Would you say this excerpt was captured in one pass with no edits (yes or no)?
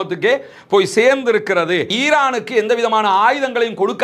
no